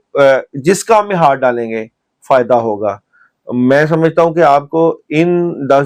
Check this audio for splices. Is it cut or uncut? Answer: uncut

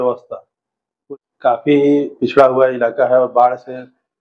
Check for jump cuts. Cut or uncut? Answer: cut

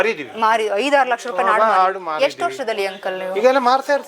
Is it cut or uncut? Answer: uncut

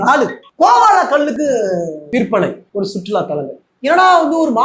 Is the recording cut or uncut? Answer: cut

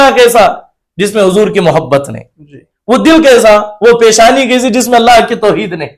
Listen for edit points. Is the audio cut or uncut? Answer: uncut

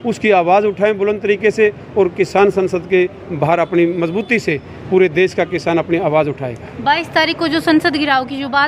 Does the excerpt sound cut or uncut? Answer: uncut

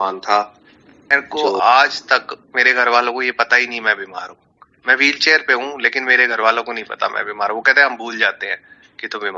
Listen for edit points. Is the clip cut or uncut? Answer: cut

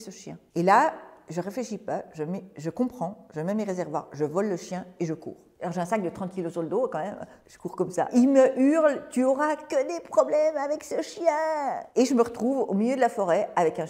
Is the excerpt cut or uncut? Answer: uncut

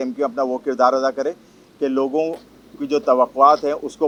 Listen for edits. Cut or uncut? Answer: uncut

